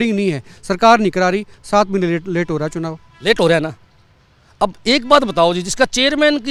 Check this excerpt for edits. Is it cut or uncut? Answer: uncut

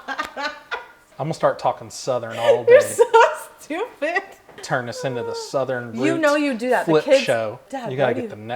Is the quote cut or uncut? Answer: cut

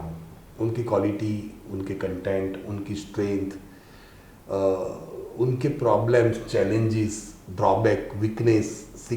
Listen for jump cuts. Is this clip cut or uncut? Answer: uncut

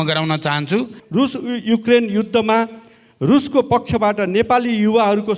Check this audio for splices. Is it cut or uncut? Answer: cut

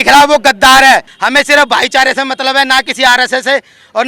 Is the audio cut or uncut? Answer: cut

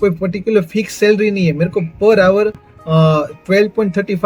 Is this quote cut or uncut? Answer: uncut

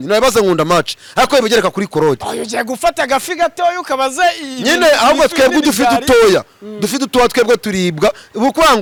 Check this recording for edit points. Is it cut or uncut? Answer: uncut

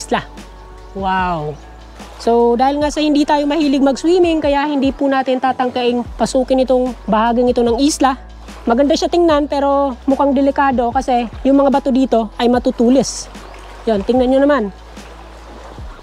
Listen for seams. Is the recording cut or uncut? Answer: uncut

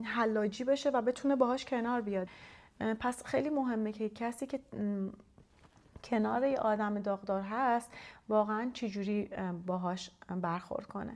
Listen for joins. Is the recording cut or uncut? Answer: cut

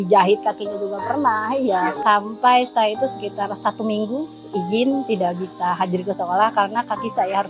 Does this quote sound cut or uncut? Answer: cut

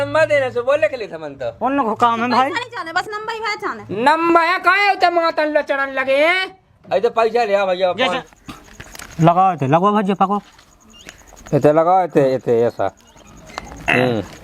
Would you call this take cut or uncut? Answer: cut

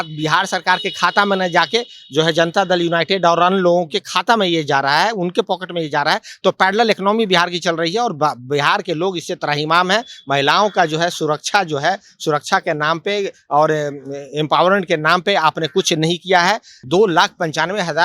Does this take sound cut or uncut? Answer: cut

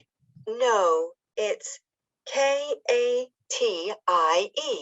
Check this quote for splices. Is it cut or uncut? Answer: cut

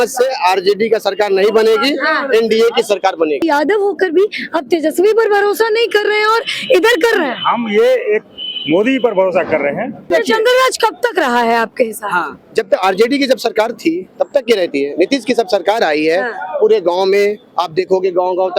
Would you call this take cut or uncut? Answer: cut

